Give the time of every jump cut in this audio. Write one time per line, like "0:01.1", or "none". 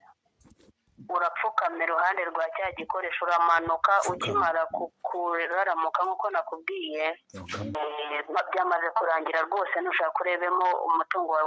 0:07.8